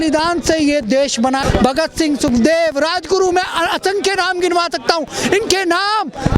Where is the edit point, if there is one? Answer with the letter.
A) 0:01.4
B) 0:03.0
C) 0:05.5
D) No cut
A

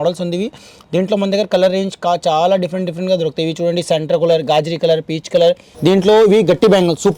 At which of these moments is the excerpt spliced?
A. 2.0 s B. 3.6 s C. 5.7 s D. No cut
C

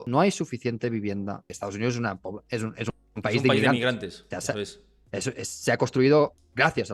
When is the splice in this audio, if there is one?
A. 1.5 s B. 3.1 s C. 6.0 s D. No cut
A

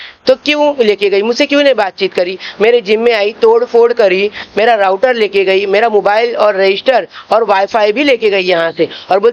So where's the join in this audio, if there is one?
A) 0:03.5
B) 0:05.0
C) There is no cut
C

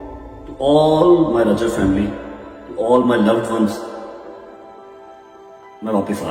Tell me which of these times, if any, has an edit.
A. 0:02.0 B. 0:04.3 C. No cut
C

